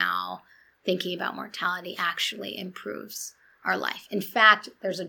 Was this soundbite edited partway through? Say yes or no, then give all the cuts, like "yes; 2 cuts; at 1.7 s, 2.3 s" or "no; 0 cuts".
no; 0 cuts